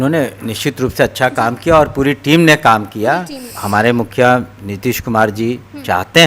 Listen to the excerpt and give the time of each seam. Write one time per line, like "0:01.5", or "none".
0:03.6